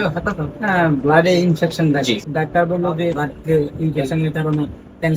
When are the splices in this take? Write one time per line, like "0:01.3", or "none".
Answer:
0:02.2
0:03.2